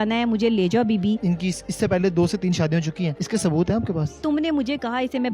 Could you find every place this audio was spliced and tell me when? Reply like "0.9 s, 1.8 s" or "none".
1.2 s, 3.2 s, 4.1 s

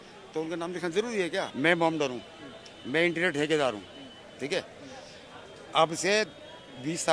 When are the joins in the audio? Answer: 1.5 s

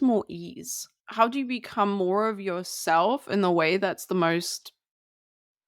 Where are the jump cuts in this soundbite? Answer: 1.0 s

